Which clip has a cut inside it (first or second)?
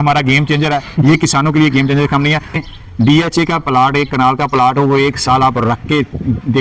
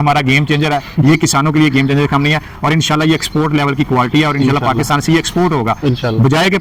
first